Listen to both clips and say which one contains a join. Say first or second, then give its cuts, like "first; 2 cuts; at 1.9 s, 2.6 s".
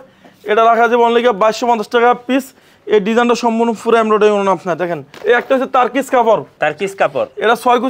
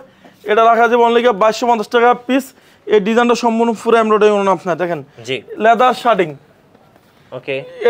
first; 2 cuts; at 5.1 s, 6.5 s